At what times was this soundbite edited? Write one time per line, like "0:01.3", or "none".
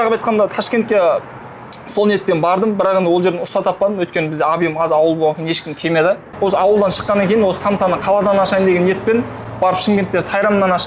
0:06.3